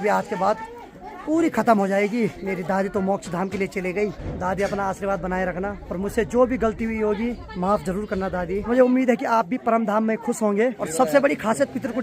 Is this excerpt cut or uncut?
cut